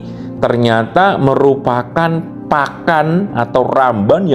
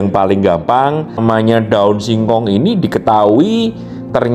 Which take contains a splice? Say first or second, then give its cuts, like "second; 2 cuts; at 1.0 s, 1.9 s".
second; 1 cut; at 1.2 s